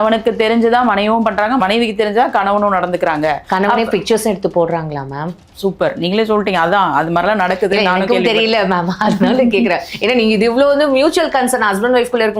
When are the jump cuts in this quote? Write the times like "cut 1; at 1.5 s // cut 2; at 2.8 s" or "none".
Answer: cut 1; at 1.6 s